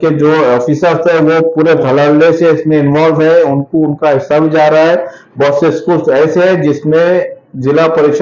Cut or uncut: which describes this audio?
uncut